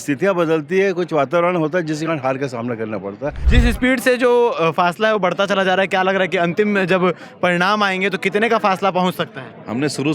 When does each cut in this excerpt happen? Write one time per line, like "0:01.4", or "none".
0:03.4